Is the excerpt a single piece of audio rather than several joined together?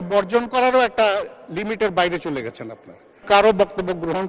no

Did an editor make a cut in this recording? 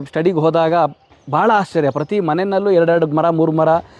no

